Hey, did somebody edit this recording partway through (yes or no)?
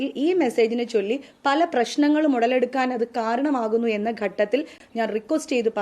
yes